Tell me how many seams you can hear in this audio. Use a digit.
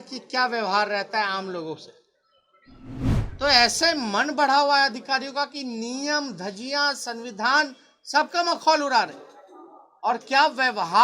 1